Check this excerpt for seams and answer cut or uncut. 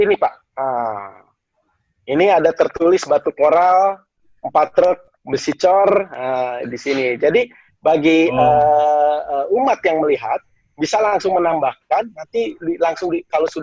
uncut